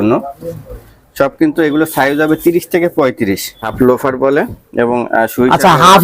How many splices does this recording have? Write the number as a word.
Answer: one